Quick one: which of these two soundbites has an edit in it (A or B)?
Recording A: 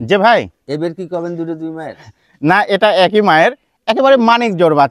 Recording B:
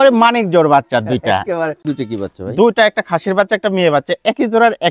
B